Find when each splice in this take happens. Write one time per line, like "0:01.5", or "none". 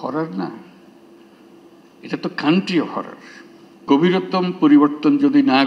0:03.8